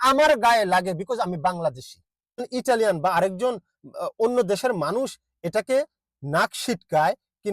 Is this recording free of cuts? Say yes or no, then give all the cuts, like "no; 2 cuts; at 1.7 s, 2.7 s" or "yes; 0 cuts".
no; 1 cut; at 2.5 s